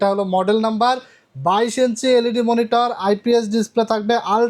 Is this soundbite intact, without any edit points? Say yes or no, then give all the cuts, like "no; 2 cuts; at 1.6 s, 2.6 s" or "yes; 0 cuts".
yes; 0 cuts